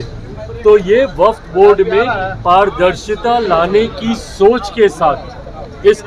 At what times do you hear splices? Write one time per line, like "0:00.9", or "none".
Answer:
none